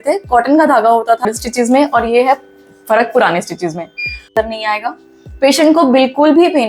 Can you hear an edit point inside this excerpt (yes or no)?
yes